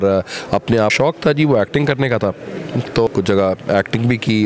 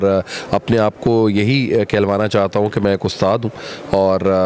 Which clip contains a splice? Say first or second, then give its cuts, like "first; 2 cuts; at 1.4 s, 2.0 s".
first; 2 cuts; at 0.9 s, 3.1 s